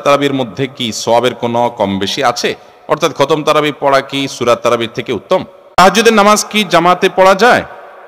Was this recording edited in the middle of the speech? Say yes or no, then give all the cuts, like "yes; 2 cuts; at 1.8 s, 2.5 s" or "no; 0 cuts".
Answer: yes; 1 cut; at 5.2 s